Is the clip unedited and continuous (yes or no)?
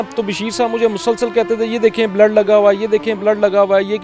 yes